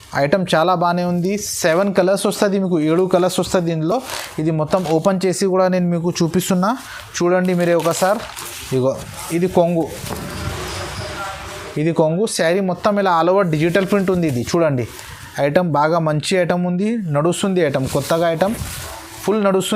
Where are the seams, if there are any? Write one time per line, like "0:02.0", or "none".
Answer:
none